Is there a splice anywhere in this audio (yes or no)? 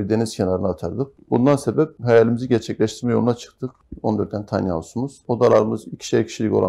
yes